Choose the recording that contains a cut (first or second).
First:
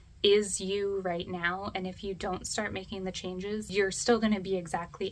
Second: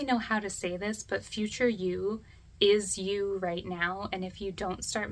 first